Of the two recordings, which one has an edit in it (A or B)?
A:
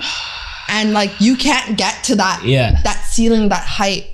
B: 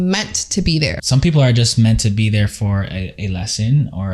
B